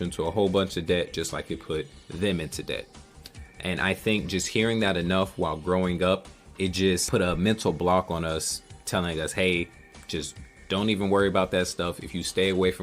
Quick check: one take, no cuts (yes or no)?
no